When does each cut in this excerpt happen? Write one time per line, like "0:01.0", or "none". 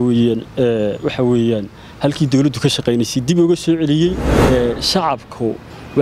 0:04.3